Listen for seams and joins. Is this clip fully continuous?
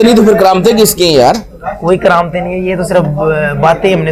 yes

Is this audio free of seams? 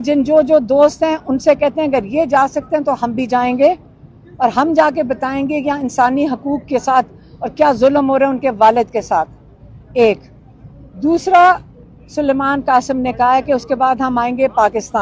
yes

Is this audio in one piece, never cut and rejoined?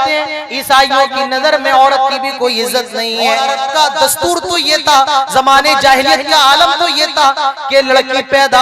no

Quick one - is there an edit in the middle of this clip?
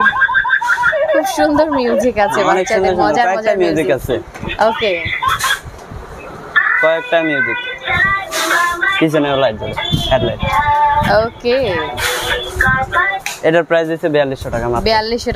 no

